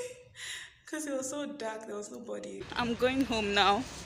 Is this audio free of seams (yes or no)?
no